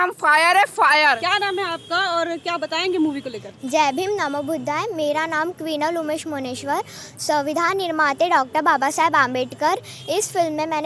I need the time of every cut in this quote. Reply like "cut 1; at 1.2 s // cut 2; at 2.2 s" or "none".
cut 1; at 1.0 s